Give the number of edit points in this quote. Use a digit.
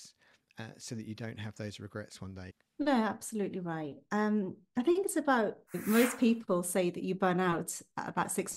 2